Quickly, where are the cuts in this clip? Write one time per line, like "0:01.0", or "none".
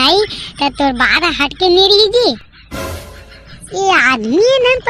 none